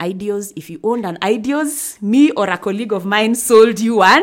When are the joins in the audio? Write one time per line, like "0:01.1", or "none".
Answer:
none